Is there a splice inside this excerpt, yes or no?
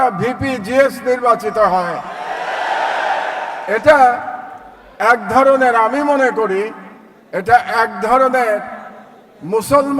no